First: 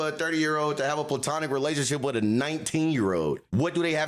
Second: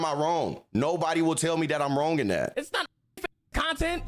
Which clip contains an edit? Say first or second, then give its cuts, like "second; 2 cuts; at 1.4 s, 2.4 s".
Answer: second; 1 cut; at 2.5 s